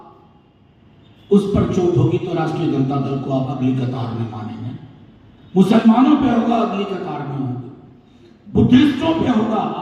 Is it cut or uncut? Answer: uncut